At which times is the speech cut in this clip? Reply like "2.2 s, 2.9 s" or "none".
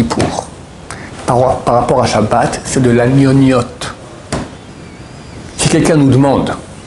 none